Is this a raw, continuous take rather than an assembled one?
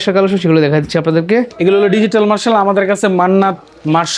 no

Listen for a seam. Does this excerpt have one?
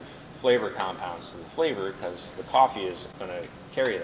yes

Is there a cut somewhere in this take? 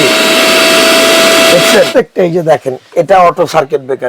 yes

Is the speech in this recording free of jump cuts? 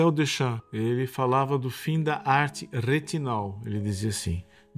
yes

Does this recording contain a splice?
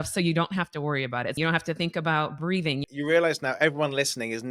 yes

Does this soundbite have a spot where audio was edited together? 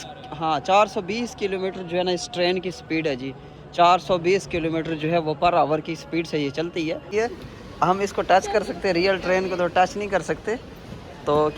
yes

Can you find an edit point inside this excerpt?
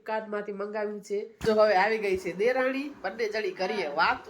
yes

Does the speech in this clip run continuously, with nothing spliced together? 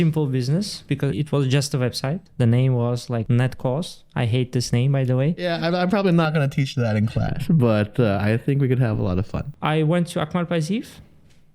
no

